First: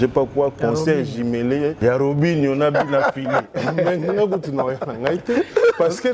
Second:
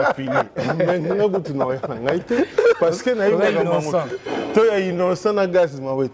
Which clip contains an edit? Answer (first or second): first